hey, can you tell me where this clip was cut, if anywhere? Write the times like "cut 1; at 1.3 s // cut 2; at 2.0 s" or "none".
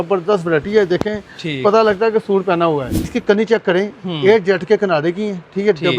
cut 1; at 3.2 s